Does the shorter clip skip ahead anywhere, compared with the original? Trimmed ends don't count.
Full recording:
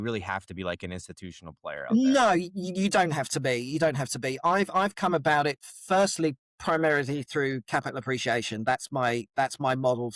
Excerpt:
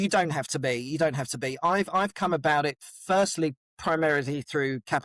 no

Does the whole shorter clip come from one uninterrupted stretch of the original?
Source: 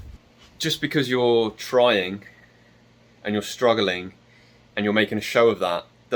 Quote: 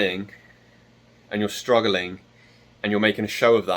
yes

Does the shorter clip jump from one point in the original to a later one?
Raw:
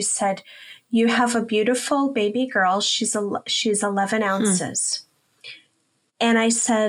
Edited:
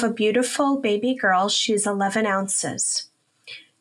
yes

